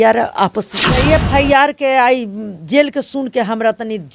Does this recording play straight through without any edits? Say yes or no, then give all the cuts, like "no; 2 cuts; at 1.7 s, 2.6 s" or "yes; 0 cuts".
no; 1 cut; at 1.0 s